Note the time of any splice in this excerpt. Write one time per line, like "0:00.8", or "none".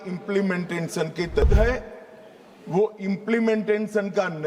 0:01.4

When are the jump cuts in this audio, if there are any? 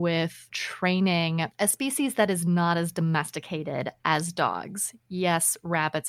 none

